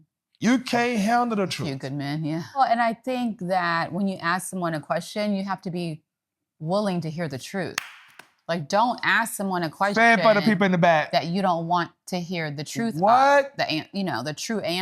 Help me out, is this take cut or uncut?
cut